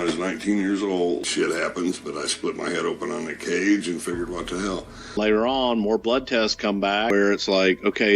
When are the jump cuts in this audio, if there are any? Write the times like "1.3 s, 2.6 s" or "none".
1.3 s, 5.1 s, 7.1 s

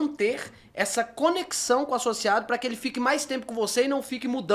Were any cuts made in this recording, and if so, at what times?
none

